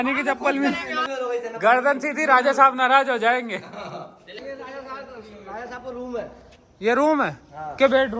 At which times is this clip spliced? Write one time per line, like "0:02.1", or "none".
0:01.0
0:04.4